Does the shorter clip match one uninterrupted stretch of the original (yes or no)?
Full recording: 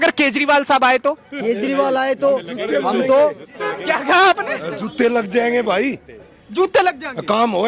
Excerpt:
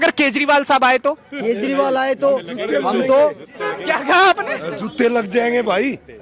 yes